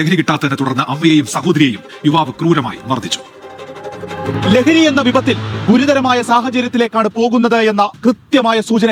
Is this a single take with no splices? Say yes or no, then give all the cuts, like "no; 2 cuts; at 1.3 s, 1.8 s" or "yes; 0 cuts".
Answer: yes; 0 cuts